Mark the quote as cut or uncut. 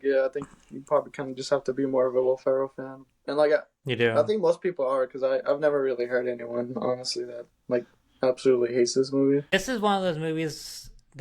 cut